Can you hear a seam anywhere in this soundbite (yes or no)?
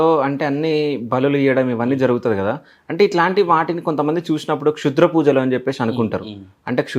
no